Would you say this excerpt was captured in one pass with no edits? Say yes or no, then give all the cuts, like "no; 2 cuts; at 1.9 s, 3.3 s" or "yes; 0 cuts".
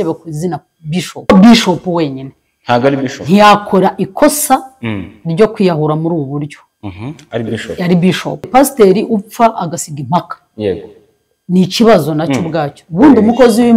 no; 2 cuts; at 1.3 s, 8.5 s